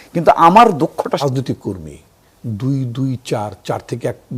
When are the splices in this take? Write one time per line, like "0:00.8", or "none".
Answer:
0:01.2

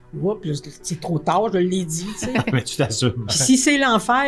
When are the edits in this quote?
0:03.3

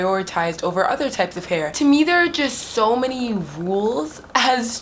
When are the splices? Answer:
0:01.7

